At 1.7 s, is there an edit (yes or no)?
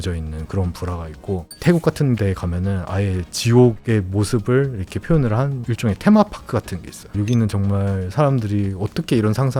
no